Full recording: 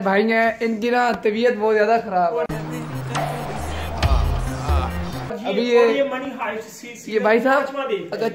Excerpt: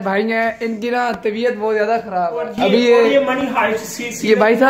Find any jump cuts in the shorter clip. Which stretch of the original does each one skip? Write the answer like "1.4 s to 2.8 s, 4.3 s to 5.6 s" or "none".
2.5 s to 5.3 s